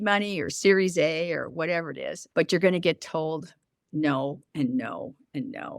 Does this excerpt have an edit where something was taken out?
yes; 1 cut; at 2.1 s

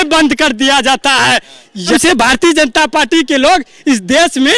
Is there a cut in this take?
yes; 1 cut; at 1.9 s

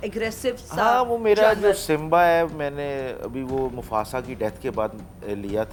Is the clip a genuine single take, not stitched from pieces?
yes; 0 cuts

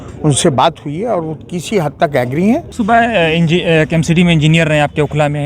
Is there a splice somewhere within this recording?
yes; 1 cut; at 2.7 s

